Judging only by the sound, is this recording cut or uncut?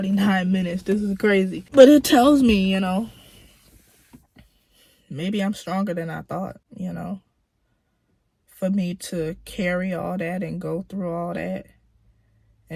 uncut